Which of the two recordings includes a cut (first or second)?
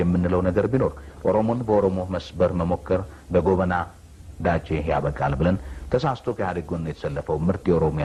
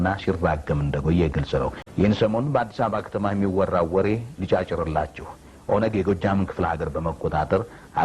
second